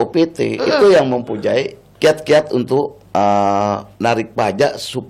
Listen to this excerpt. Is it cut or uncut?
cut